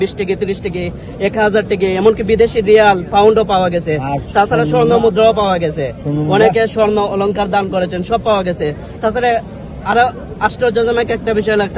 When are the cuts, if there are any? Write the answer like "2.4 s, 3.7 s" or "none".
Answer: none